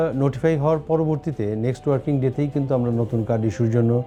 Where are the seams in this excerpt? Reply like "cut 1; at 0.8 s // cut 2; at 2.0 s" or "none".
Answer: none